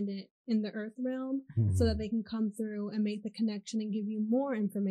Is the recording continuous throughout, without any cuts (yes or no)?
yes